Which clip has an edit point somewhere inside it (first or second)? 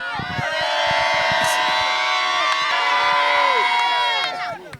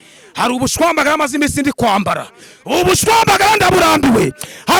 first